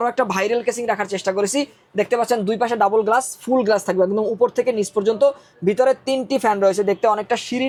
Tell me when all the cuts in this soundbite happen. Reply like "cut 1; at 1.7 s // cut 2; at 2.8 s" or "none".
none